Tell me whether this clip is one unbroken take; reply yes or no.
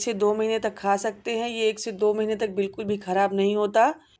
yes